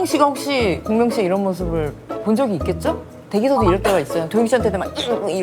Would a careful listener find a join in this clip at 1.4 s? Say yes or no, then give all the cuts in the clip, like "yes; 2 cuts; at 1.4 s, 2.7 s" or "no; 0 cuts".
no; 1 cut; at 3.1 s